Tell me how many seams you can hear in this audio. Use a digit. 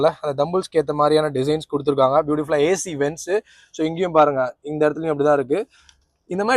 0